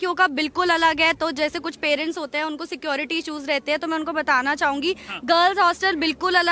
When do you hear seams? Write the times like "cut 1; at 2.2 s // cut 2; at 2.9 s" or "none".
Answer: none